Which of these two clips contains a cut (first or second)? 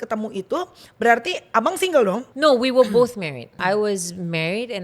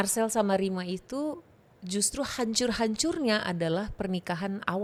first